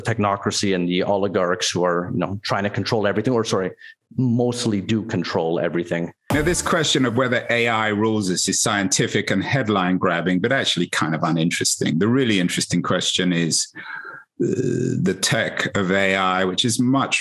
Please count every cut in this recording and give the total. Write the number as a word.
one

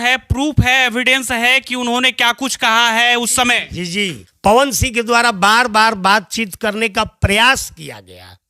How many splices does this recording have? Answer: one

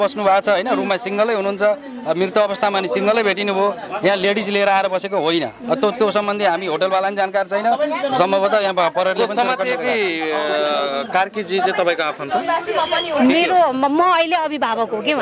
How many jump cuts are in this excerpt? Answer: zero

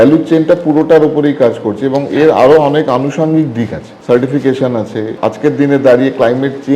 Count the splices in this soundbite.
two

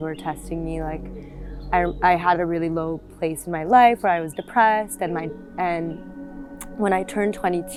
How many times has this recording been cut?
zero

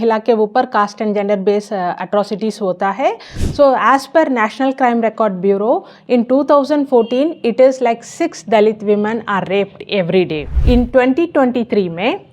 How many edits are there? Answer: two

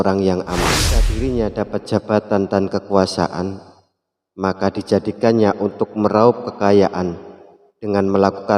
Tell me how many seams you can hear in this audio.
one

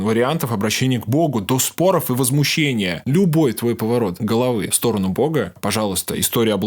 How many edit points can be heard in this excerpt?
three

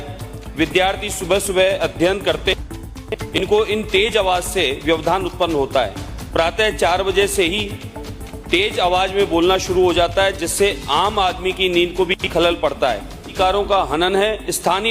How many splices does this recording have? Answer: one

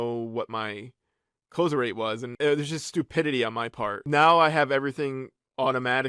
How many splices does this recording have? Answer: two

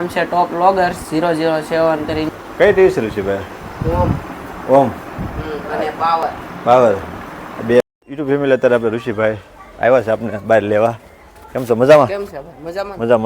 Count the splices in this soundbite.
two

